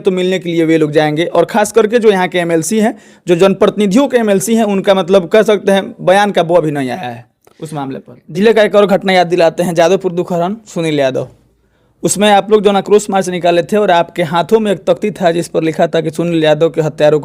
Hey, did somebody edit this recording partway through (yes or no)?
yes